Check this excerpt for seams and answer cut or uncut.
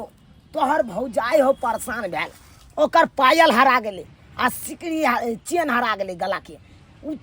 uncut